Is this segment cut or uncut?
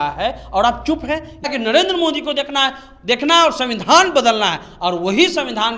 cut